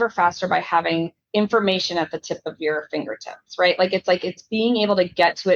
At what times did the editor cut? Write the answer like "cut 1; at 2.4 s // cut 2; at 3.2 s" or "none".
cut 1; at 1.2 s